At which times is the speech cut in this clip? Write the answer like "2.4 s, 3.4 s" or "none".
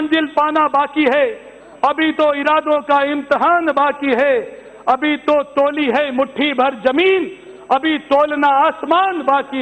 none